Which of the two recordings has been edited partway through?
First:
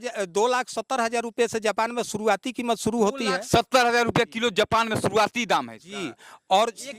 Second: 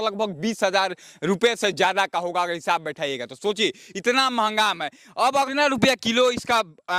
second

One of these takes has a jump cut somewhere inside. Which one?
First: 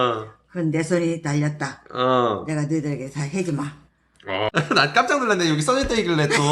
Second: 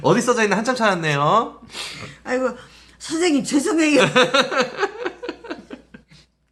first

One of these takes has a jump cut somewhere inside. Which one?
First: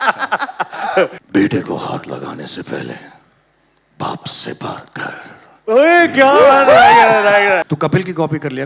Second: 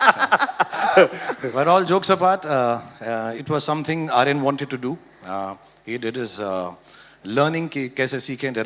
first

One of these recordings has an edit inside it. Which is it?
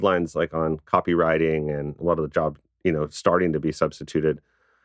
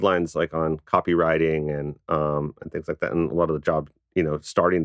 first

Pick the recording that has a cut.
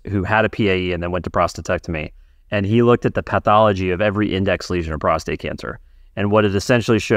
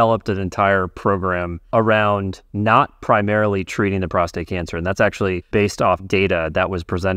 second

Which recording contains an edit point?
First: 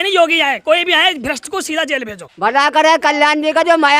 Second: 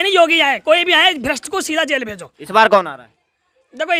first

